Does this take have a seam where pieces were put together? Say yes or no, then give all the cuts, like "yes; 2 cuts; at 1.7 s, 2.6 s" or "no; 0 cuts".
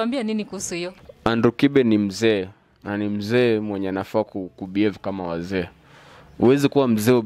yes; 1 cut; at 1.0 s